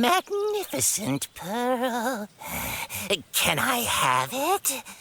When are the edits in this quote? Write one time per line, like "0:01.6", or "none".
none